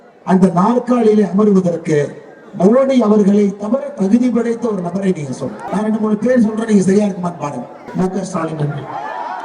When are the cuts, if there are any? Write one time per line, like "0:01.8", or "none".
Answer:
0:05.6
0:07.8